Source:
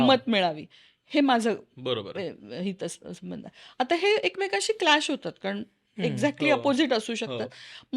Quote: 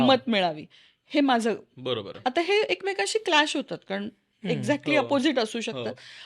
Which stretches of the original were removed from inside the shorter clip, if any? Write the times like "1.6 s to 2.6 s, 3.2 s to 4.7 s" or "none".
2.1 s to 3.6 s

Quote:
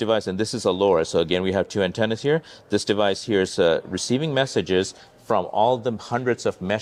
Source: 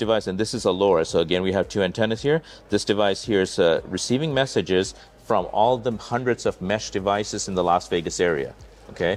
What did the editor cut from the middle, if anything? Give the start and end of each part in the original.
none

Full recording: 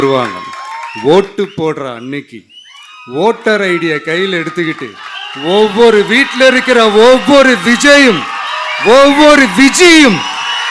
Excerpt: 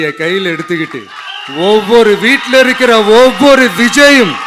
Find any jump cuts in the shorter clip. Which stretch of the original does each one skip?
none

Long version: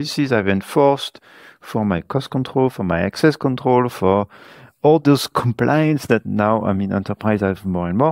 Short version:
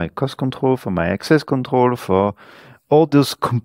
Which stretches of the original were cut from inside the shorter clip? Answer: none

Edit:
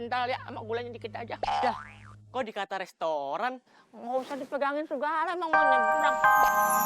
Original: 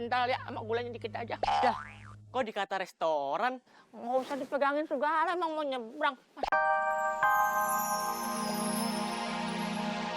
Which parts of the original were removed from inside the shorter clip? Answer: 5.5 s to 6.5 s

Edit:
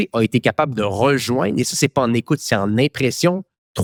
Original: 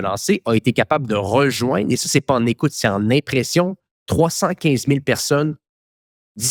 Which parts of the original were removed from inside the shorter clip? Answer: none

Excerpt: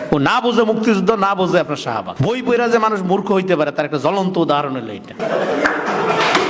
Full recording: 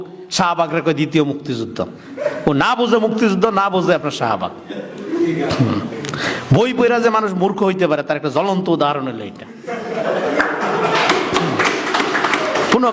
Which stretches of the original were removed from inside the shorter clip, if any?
4.4 s to 6.4 s, 9.4 s to 9.9 s

